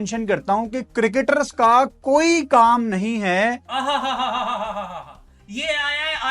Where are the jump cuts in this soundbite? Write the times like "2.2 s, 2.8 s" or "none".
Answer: 3.7 s